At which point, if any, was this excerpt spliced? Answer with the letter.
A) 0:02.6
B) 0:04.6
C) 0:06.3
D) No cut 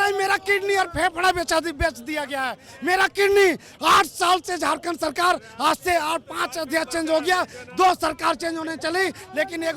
D